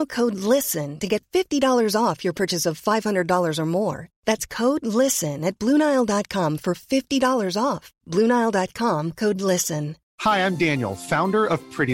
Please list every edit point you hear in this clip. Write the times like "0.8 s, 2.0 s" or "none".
10.0 s